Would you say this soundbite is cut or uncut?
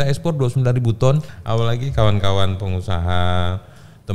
cut